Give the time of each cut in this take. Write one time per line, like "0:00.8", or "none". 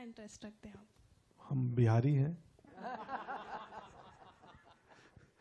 none